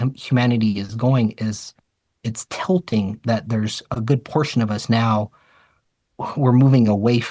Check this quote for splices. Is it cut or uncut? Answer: uncut